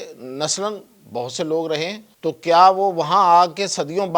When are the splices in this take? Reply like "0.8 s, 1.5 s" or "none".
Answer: 2.1 s